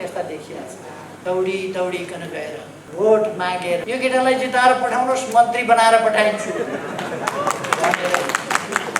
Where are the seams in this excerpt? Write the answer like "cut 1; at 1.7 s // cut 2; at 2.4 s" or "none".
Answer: cut 1; at 1.1 s // cut 2; at 2.8 s // cut 3; at 3.8 s